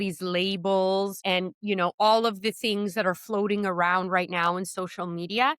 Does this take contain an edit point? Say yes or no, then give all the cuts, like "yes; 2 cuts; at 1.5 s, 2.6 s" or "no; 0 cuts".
yes; 1 cut; at 1.2 s